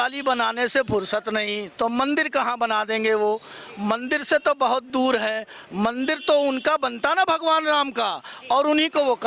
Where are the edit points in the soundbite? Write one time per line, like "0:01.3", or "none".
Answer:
none